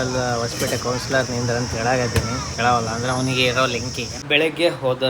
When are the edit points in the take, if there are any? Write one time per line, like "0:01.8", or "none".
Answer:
0:04.1